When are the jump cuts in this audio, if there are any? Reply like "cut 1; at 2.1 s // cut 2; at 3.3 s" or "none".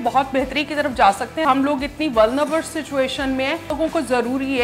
cut 1; at 1.4 s // cut 2; at 3.7 s